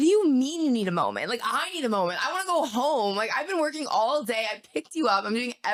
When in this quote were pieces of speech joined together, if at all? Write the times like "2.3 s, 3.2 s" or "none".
none